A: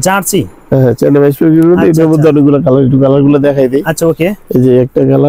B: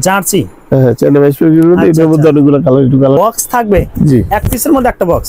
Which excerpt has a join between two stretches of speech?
B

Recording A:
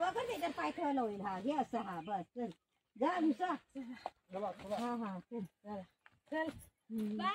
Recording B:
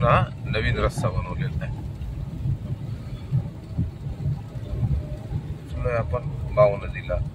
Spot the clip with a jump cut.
B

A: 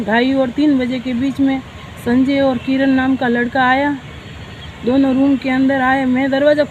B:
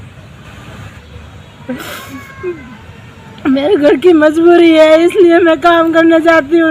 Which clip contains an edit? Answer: B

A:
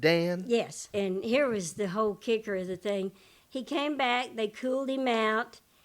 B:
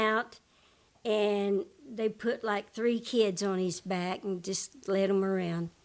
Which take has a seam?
A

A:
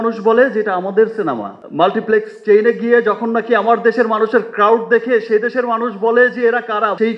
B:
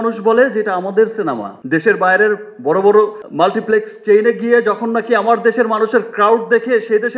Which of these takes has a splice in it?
A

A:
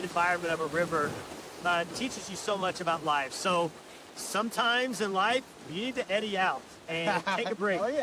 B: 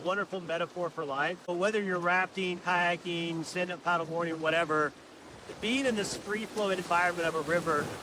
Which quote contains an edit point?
B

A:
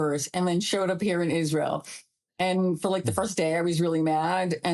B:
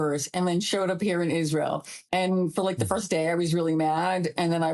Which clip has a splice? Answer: B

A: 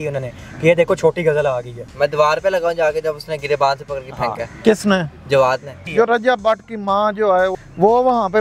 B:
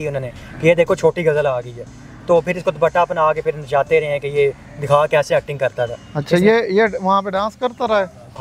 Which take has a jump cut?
A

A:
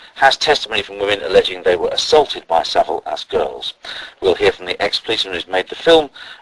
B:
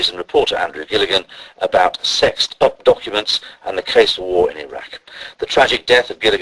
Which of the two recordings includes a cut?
A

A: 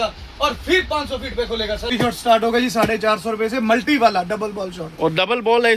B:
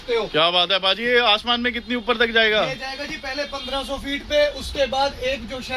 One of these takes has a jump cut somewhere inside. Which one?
A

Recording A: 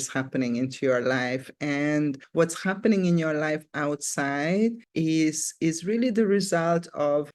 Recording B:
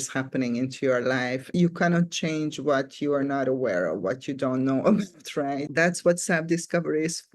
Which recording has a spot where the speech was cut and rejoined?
B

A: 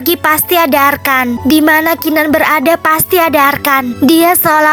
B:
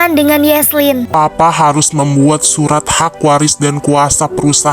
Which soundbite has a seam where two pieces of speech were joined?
B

